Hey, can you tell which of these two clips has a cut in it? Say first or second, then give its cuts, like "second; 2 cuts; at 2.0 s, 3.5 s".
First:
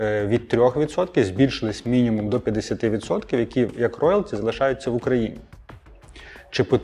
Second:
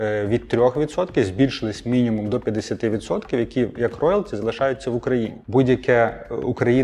second; 1 cut; at 5.4 s